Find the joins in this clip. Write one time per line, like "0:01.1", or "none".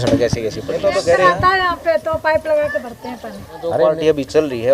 0:01.0
0:03.7

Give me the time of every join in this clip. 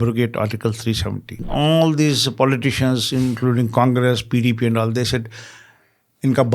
0:01.4

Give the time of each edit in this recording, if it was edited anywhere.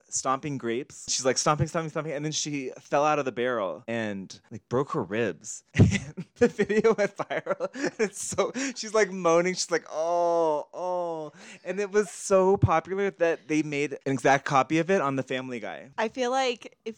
0:01.1
0:06.2
0:15.9

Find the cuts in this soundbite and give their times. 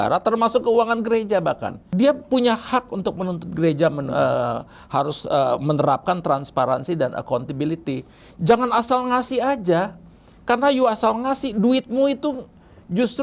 0:01.8

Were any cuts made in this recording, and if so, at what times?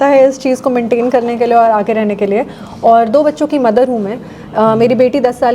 none

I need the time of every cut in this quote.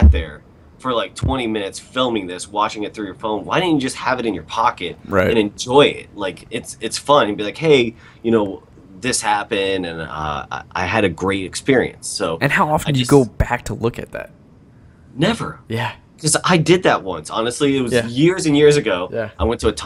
none

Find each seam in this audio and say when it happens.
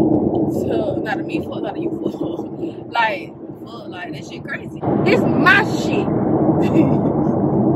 0:04.8

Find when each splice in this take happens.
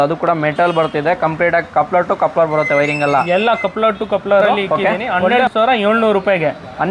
0:05.0

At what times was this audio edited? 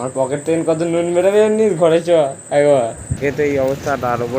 0:03.2

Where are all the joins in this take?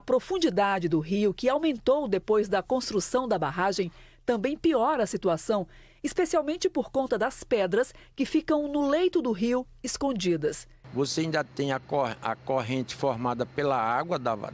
none

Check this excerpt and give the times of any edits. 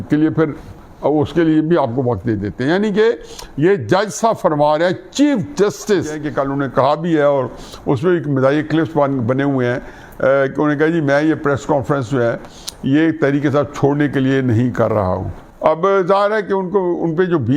0:06.2

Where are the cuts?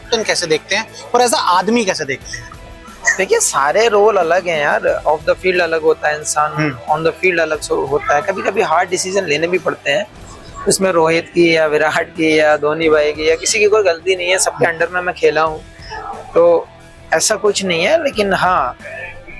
none

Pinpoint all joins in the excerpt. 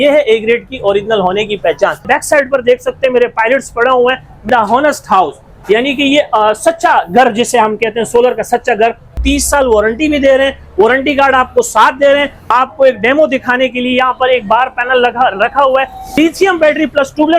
0:02.0
0:04.5
0:09.1
0:12.5
0:16.2

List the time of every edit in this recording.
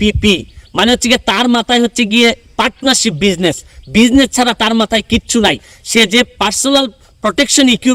none

